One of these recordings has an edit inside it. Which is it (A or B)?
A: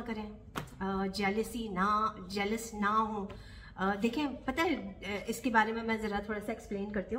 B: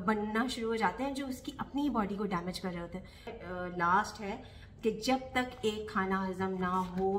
B